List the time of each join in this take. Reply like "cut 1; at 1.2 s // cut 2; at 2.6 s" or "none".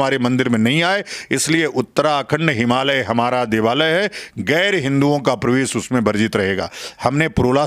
none

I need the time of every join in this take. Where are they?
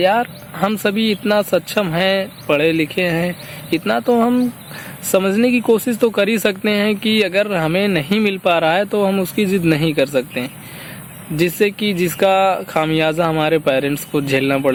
none

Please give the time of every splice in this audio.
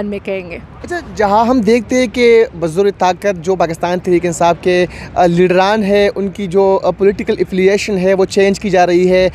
none

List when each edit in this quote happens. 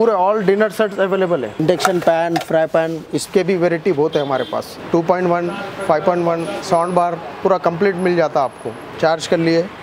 cut 1; at 1.5 s // cut 2; at 4.7 s // cut 3; at 8.9 s

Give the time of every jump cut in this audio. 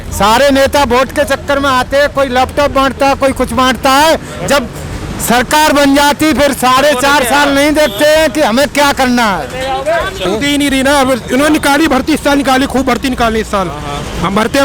cut 1; at 10.3 s

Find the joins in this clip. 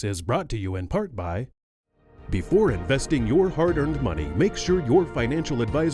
cut 1; at 1.6 s

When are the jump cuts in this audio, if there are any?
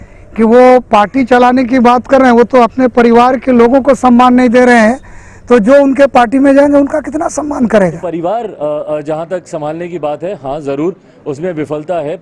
cut 1; at 8.0 s

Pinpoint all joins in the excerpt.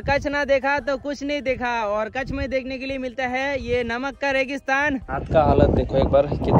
cut 1; at 5.2 s

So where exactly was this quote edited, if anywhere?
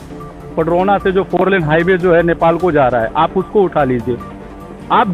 none

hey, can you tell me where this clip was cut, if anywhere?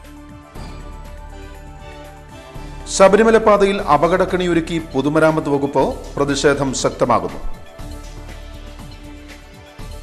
cut 1; at 2.4 s

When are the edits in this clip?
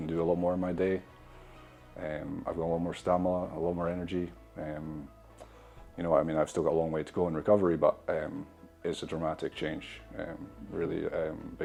none

